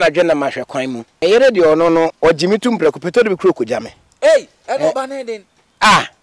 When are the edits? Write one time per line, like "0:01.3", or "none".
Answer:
0:01.0
0:02.1